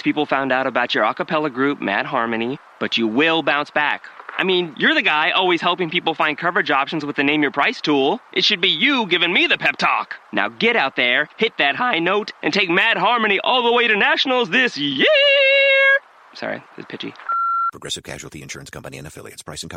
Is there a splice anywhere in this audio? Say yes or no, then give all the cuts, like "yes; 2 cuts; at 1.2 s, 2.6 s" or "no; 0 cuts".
no; 0 cuts